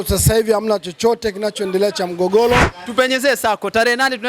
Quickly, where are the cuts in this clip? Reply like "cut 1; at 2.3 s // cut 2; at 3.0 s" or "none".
cut 1; at 2.8 s